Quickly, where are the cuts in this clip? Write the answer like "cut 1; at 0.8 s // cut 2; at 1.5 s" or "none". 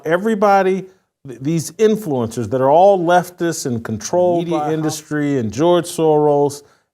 cut 1; at 4.5 s